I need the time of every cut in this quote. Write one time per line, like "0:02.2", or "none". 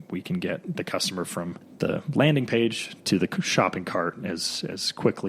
0:01.6